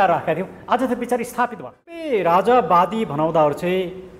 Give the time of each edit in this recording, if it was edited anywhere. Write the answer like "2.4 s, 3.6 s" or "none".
2.0 s